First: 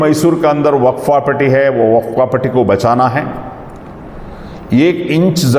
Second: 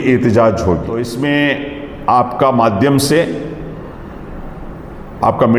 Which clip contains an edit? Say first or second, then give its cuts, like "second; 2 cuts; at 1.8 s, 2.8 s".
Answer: second; 1 cut; at 1.2 s